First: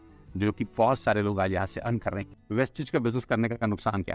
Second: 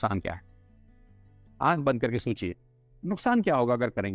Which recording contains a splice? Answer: first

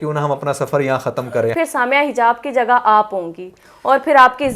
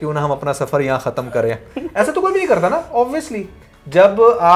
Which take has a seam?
first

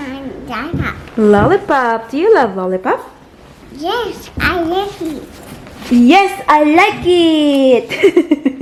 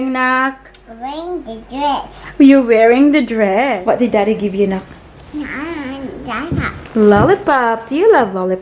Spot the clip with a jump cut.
second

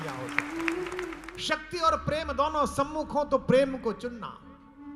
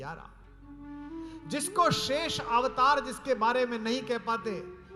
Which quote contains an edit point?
first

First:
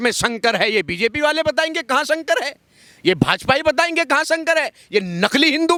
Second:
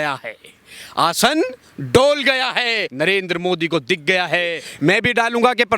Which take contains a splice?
second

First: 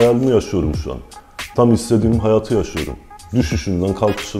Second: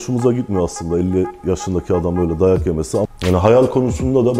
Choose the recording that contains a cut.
second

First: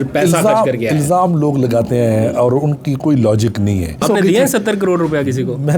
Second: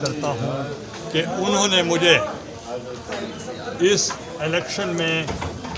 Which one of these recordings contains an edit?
first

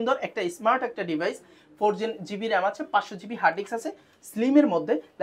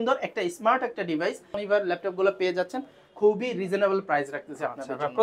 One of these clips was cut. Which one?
second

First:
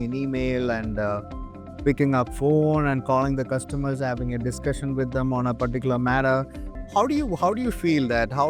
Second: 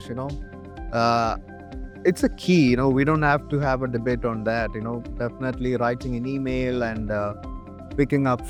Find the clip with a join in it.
first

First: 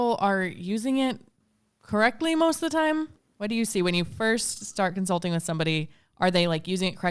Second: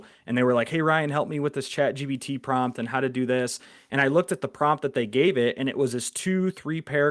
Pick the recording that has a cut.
first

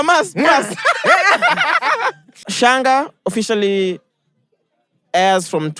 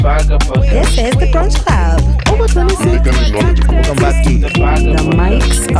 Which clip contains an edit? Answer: first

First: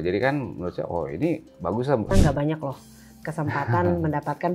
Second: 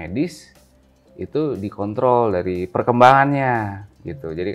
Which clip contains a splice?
first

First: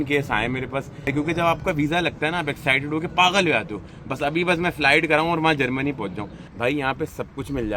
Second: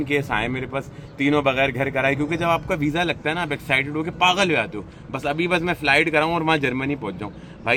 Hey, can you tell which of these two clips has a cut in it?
first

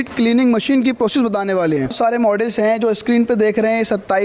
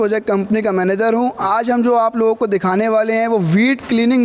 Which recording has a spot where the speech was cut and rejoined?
first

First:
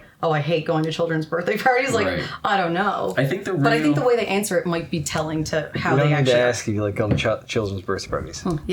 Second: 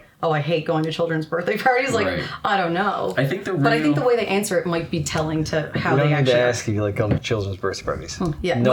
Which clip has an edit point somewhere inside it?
second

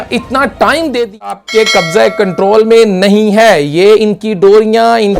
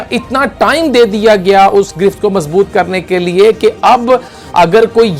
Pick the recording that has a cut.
first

